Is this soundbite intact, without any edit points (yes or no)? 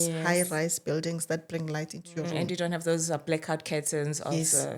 yes